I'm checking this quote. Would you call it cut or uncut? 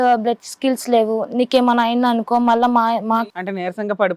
cut